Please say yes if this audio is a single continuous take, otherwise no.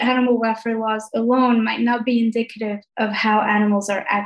yes